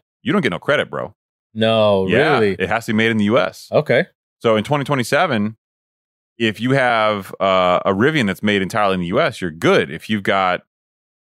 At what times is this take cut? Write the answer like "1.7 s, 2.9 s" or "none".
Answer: none